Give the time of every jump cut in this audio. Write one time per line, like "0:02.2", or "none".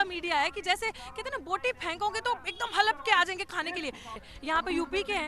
0:04.1